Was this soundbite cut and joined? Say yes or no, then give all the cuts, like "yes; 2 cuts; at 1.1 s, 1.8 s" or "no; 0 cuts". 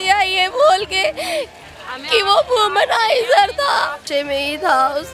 yes; 1 cut; at 4.1 s